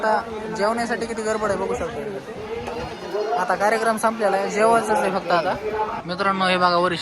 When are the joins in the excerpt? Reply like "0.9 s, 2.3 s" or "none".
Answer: 6.0 s